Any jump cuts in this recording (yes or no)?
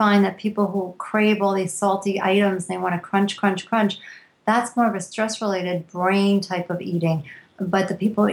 no